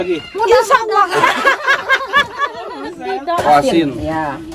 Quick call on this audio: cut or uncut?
cut